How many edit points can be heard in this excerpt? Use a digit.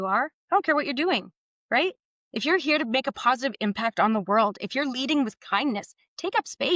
0